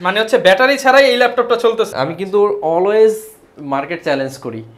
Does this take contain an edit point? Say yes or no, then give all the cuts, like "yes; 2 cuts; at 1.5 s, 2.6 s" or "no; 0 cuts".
yes; 1 cut; at 1.9 s